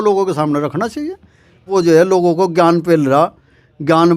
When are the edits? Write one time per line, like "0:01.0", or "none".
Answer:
0:01.7